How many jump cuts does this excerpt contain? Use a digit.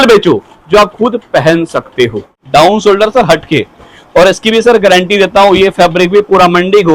1